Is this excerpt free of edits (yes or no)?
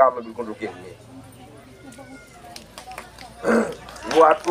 yes